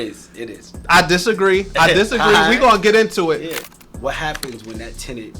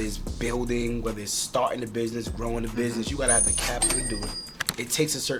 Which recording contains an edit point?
first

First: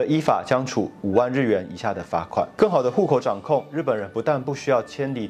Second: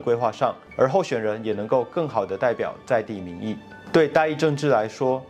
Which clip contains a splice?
first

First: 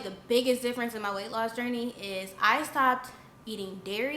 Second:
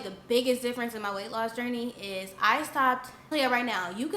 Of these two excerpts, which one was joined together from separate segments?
second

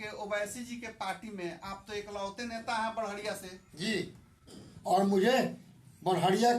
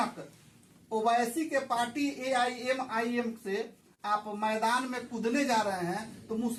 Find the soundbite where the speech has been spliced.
first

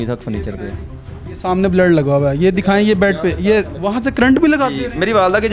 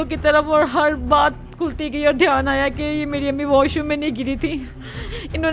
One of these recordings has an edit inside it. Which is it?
first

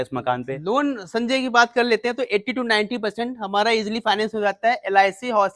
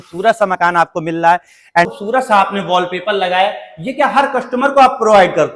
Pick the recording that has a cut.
second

